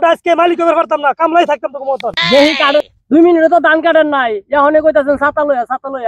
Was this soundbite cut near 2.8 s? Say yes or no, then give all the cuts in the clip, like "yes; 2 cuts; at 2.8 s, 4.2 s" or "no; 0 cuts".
yes; 1 cut; at 2.8 s